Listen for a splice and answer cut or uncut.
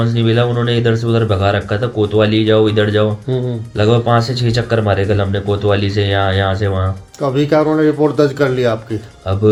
uncut